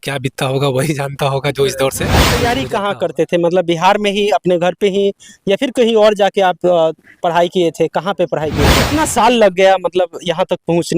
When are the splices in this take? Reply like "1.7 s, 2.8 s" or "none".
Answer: 2.4 s, 8.7 s